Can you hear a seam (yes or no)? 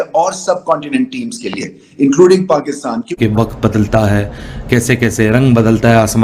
yes